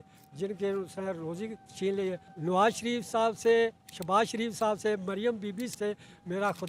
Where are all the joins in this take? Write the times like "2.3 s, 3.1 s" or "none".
2.3 s, 5.7 s